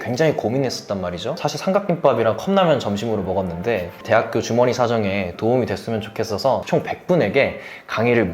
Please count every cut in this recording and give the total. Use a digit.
1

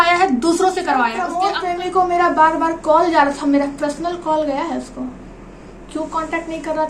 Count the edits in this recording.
1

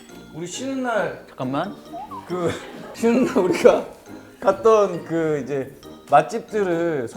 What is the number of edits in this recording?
1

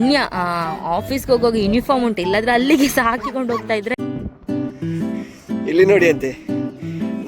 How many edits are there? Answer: 1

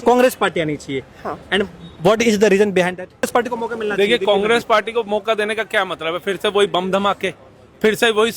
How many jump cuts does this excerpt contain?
1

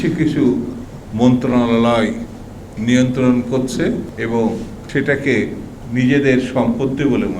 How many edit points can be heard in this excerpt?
2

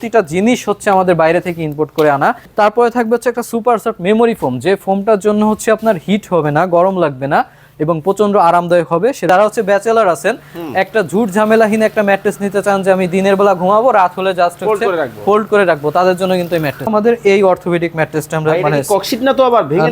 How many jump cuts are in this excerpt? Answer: 3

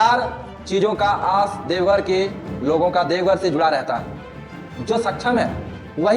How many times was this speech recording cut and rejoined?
1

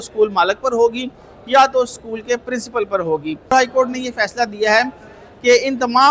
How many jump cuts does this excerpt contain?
1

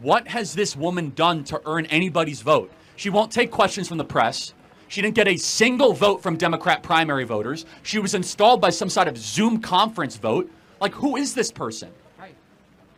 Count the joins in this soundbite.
0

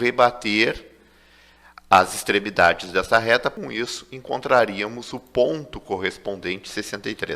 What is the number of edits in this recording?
1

